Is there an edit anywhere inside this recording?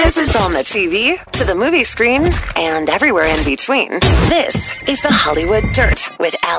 no; 0 cuts

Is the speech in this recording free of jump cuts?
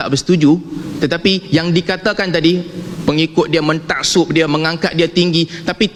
yes; 0 cuts

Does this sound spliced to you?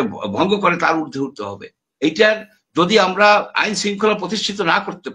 no; 0 cuts

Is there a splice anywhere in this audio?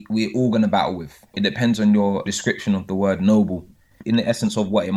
yes; 3 cuts; at 1.4 s, 2.3 s, 3.9 s

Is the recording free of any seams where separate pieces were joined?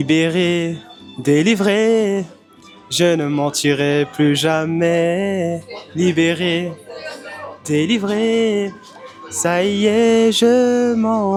yes; 0 cuts

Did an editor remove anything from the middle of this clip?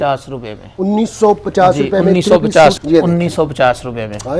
yes; 1 cut; at 2.8 s

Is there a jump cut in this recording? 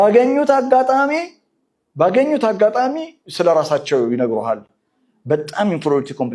no; 0 cuts

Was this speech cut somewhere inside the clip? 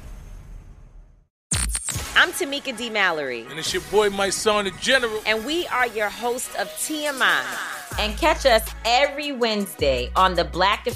yes; 1 cut; at 1.3 s

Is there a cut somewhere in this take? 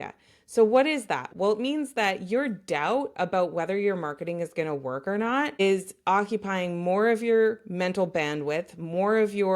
yes; 1 cut; at 1.3 s

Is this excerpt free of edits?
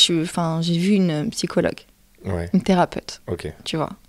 yes; 0 cuts

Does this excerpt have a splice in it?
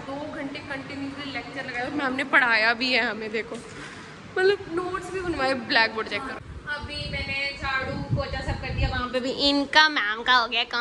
yes; 1 cut; at 6.5 s

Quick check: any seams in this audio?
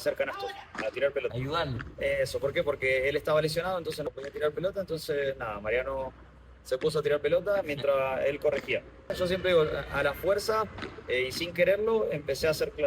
yes; 3 cuts; at 1.4 s, 4.0 s, 9.1 s

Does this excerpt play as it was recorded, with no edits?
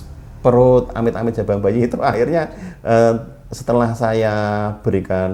yes; 0 cuts

